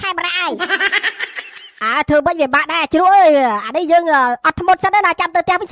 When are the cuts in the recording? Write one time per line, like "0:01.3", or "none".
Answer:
none